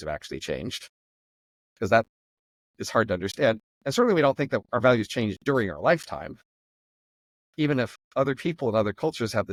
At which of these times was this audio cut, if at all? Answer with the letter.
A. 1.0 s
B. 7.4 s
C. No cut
C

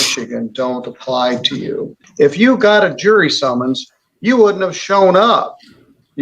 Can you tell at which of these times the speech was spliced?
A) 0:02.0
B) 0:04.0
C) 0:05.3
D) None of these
A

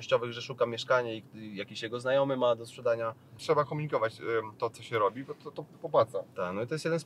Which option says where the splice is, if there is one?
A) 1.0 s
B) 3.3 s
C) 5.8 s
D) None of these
B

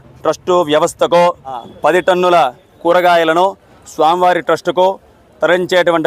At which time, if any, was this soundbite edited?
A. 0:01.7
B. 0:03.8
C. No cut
A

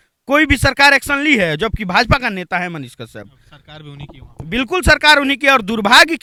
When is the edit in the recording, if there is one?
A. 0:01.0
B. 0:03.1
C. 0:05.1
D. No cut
D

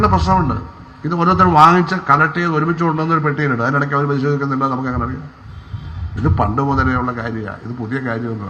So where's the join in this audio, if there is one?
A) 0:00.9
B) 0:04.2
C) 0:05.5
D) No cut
D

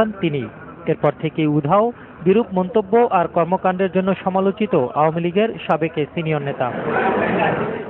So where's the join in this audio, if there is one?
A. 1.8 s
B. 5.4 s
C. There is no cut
A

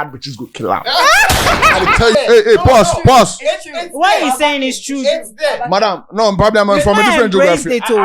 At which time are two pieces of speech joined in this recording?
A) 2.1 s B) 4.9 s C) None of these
A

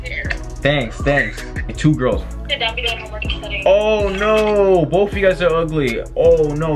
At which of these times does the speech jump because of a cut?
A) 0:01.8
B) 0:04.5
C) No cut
A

